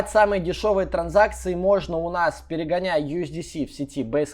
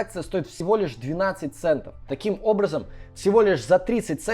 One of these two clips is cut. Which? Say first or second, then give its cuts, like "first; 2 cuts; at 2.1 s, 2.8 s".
second; 1 cut; at 2.1 s